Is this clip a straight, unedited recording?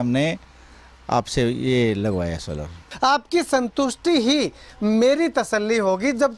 no; 1 cut; at 2.8 s

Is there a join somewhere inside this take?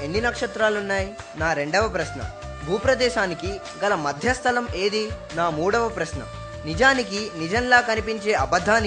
yes; 2 cuts; at 1.2 s, 5.2 s

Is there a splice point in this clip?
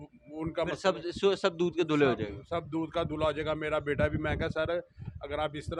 no; 0 cuts

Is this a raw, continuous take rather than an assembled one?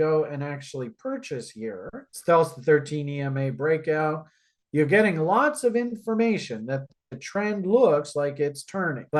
yes; 0 cuts

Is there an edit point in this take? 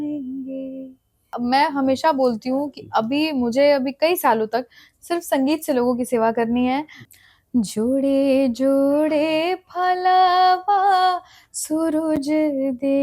yes; 2 cuts; at 1.3 s, 7.1 s

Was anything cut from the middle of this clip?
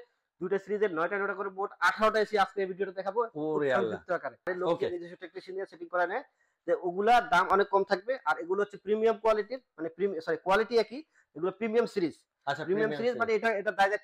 yes; 1 cut; at 4.8 s

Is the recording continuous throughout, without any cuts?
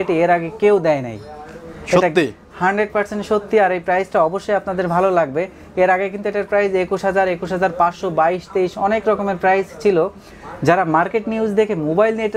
yes; 0 cuts

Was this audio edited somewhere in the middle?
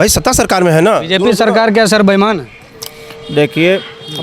no; 0 cuts

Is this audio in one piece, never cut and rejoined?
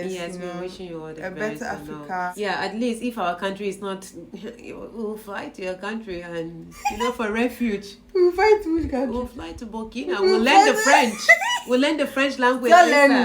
no; 1 cut; at 2.3 s

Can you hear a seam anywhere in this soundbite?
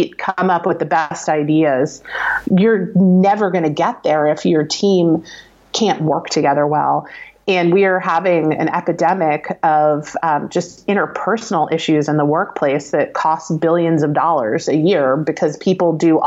no; 0 cuts

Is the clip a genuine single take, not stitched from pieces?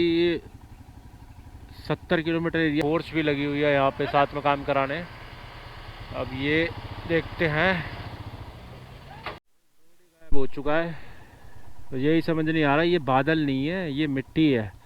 no; 2 cuts; at 2.8 s, 9.4 s

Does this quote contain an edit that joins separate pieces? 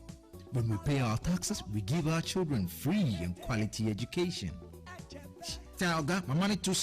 yes; 1 cut; at 1.5 s

